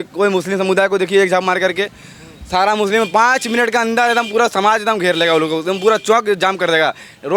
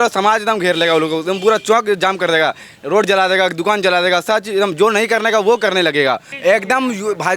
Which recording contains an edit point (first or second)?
second